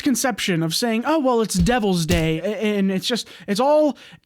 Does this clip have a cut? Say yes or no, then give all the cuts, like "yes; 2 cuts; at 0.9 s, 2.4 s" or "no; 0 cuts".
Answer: yes; 1 cut; at 2.4 s